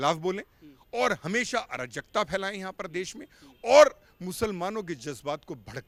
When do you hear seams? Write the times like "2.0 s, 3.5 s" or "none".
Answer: none